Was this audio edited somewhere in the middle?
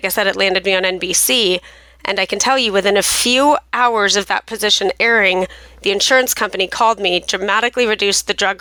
no; 0 cuts

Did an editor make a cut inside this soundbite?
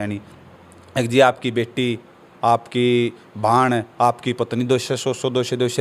no; 0 cuts

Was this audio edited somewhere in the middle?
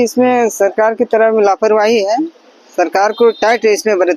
no; 0 cuts

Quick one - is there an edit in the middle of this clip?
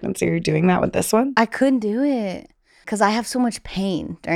yes; 1 cut; at 2.9 s

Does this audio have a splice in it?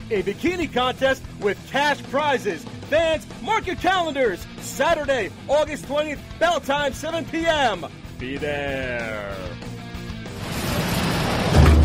yes; 1 cut; at 10.8 s

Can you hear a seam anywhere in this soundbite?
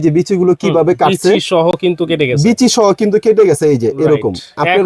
no; 0 cuts

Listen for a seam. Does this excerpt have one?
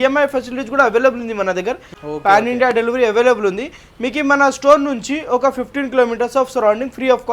yes; 1 cut; at 1.9 s

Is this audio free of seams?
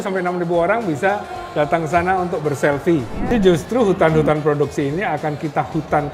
no; 1 cut; at 3.3 s

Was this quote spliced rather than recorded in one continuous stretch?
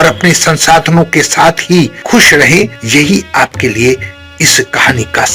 no; 0 cuts

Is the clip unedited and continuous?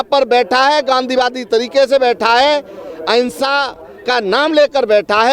yes; 0 cuts

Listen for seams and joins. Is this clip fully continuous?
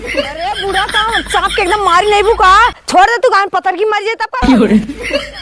yes; 0 cuts

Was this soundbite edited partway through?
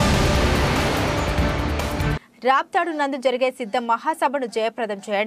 yes; 1 cut; at 1.9 s

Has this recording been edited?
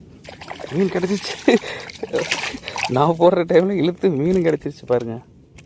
yes; 1 cut; at 3.6 s

